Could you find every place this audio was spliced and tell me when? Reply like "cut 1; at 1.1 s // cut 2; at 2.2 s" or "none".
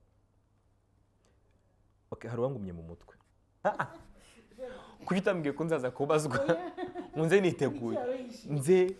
cut 1; at 3.6 s